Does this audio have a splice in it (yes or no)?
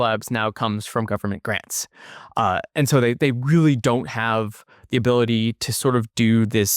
no